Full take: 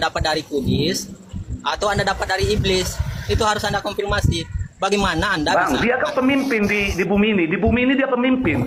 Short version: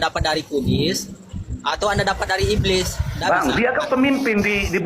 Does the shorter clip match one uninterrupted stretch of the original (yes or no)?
no